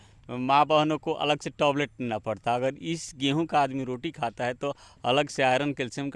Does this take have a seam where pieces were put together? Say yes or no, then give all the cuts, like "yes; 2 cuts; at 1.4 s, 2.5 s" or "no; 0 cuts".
no; 0 cuts